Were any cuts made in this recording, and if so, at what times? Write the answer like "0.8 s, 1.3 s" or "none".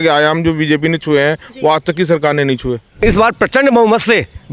2.9 s